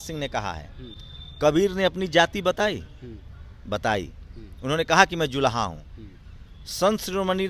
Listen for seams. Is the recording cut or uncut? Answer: uncut